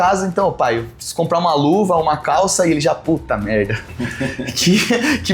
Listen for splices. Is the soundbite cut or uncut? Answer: uncut